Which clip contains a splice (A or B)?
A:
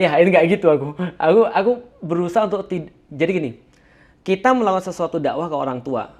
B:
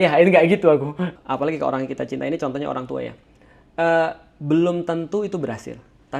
B